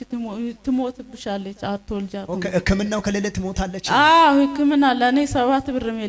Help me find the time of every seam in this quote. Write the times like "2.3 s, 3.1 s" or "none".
none